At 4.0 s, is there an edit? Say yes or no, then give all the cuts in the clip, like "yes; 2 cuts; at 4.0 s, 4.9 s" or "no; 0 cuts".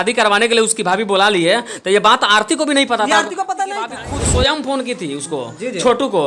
yes; 1 cut; at 4.0 s